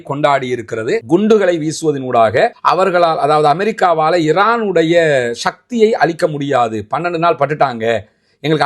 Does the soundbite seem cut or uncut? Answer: cut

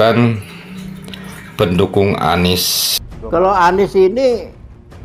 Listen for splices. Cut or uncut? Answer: cut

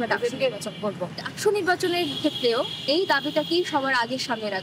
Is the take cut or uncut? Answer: uncut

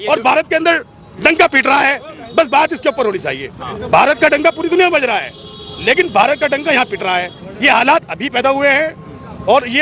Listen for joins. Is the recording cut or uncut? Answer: uncut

